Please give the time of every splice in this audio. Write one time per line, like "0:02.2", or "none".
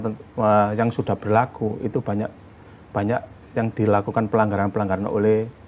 none